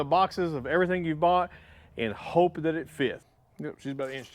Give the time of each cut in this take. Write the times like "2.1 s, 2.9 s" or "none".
3.2 s